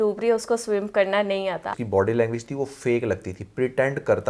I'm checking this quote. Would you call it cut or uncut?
cut